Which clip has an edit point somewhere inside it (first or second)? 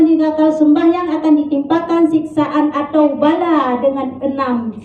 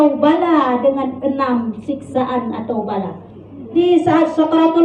second